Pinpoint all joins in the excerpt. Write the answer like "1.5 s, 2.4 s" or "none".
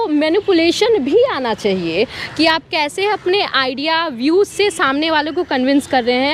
none